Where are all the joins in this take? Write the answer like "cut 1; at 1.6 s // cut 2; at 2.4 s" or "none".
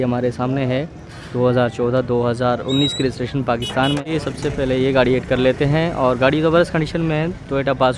cut 1; at 4.0 s